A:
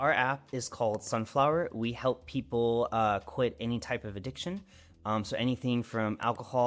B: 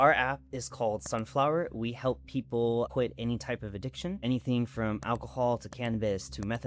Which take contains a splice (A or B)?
B